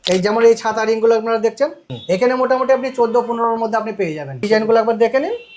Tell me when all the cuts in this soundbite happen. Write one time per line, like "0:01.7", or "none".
0:01.8
0:04.4